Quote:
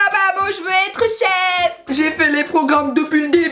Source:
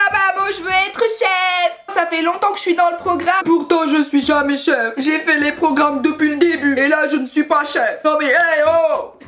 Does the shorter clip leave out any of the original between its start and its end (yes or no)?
yes